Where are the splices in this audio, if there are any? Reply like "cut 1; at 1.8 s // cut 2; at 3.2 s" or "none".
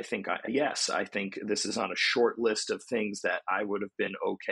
none